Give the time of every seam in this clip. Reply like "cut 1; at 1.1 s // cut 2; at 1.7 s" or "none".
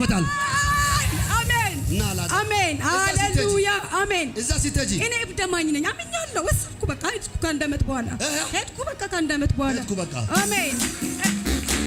none